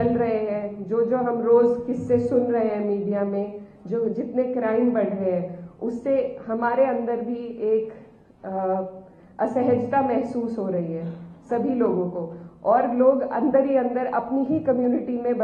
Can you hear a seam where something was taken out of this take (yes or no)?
no